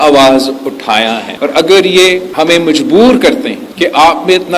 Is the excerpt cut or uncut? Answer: cut